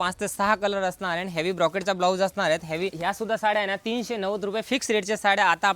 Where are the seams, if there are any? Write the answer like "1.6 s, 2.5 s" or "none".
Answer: 3.0 s